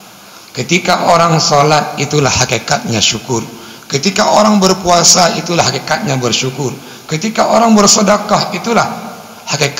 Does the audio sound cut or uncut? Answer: uncut